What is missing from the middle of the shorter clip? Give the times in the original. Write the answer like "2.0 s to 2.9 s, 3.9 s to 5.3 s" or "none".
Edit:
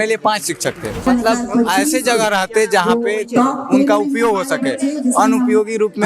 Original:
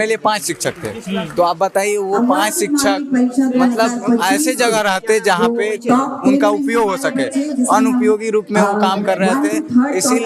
1.1 s to 3.6 s